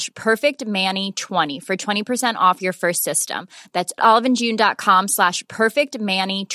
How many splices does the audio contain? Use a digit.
1